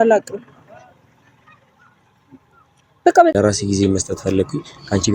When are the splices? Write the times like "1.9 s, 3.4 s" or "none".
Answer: 3.3 s